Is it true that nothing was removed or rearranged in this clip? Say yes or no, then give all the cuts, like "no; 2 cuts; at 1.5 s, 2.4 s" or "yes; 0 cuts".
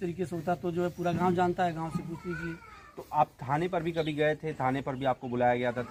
yes; 0 cuts